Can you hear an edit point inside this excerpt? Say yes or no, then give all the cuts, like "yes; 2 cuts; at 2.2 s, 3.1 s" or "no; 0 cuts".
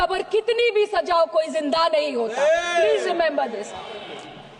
no; 0 cuts